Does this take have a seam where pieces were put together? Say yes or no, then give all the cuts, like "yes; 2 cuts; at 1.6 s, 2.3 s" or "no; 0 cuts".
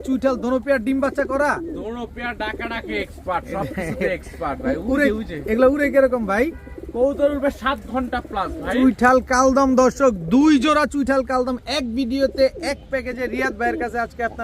no; 0 cuts